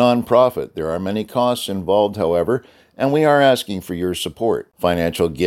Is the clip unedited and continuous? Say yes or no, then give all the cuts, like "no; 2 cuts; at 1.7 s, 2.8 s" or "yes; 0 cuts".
yes; 0 cuts